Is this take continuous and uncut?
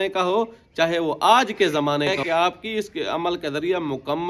no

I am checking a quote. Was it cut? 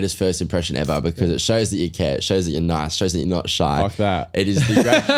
no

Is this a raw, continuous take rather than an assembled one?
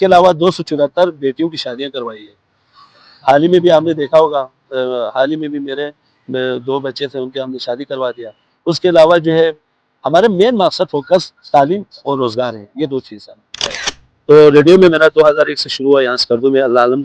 no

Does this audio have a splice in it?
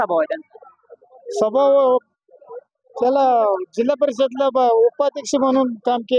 no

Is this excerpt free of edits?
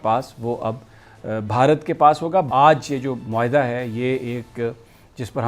no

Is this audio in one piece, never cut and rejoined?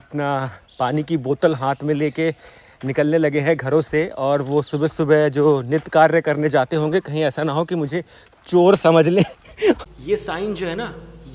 no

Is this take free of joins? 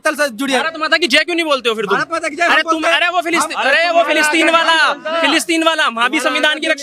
yes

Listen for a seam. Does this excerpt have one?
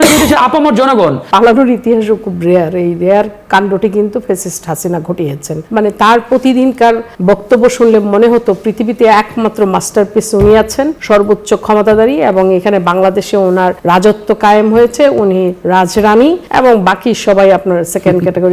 yes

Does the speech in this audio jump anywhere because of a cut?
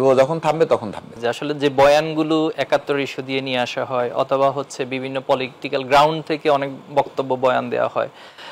yes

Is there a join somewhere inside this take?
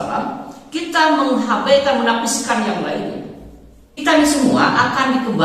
yes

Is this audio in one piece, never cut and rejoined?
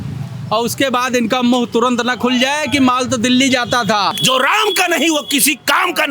no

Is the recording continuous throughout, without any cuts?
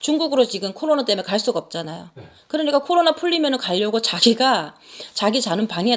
yes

